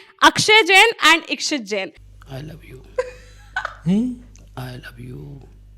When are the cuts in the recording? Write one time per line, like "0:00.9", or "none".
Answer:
0:02.0